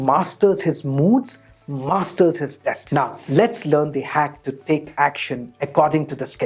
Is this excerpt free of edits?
no; 1 cut; at 2.8 s

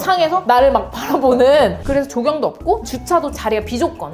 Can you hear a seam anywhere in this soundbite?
yes; 1 cut; at 1.8 s

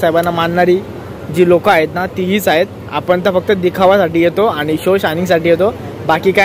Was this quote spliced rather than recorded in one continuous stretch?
no; 0 cuts

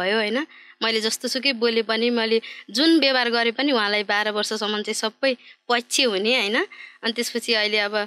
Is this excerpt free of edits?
yes; 0 cuts

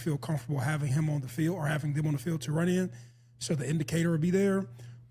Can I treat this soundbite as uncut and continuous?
yes; 0 cuts

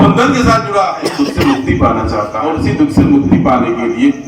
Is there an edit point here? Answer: yes; 2 cuts; at 1.0 s, 2.4 s

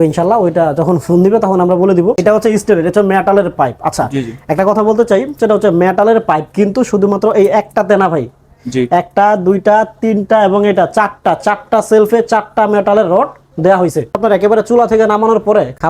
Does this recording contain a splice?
yes; 2 cuts; at 2.2 s, 14.1 s

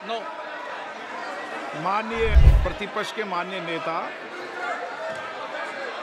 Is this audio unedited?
no; 1 cut; at 2.4 s

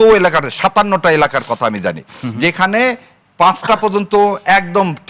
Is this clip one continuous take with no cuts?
yes; 0 cuts

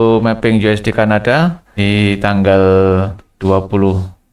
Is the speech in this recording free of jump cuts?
no; 2 cuts; at 1.7 s, 3.2 s

